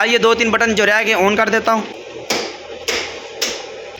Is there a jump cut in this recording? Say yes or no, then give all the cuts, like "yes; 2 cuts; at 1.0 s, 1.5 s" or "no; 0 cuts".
no; 0 cuts